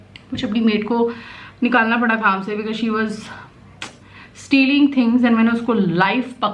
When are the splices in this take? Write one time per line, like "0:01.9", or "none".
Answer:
none